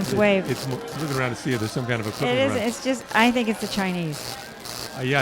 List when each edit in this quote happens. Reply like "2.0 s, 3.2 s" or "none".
0.9 s